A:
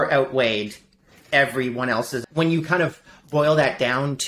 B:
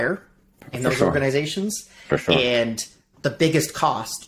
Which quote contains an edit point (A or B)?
A